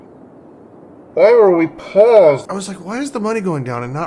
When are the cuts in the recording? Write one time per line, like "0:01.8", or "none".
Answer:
0:02.5

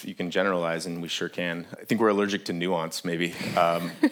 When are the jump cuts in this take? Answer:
0:01.7

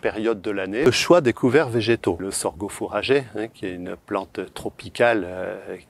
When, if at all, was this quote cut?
0:00.9
0:02.2

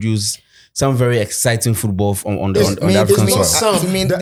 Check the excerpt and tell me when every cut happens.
none

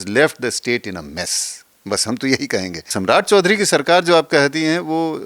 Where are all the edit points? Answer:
0:02.9

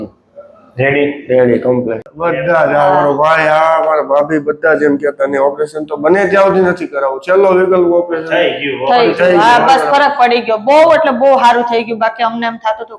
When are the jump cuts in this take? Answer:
0:02.0

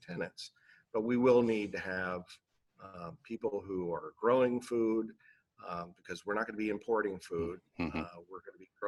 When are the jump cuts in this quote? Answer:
none

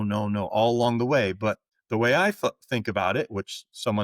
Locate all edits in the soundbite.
0:01.7

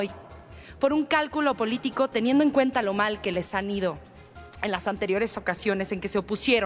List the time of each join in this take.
none

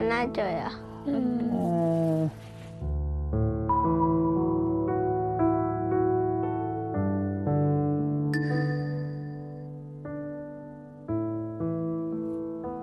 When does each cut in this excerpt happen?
none

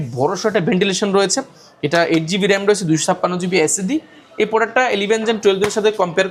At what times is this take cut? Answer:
none

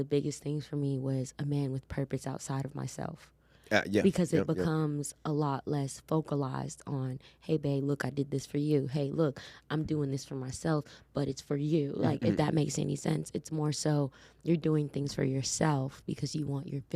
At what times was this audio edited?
none

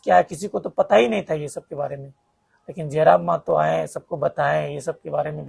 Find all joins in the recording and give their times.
none

